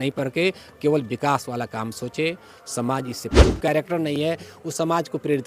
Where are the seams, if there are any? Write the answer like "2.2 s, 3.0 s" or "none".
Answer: 3.6 s

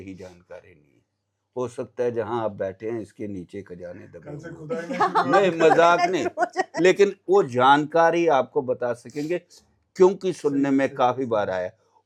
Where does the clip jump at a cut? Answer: none

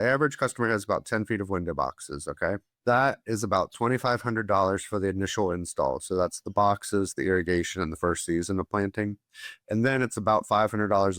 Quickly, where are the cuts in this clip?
2.7 s

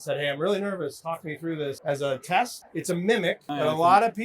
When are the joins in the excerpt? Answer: 1.8 s, 2.6 s, 3.5 s

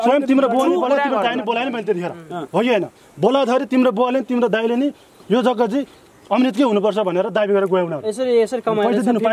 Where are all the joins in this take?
none

